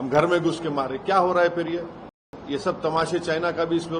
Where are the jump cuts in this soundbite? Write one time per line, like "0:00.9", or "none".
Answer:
0:02.4